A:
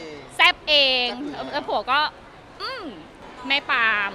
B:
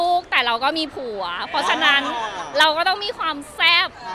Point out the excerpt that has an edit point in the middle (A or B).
A